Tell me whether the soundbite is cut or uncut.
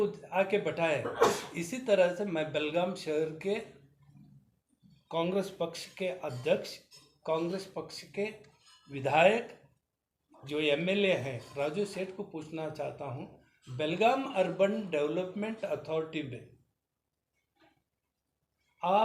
uncut